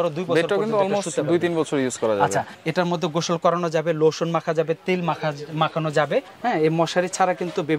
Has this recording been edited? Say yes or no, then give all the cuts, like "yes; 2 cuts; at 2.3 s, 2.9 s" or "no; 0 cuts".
yes; 2 cuts; at 2.5 s, 6.3 s